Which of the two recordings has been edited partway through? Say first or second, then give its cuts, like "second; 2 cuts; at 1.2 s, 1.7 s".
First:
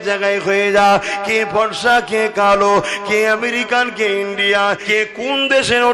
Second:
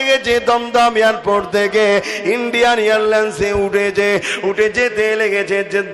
first; 1 cut; at 4.8 s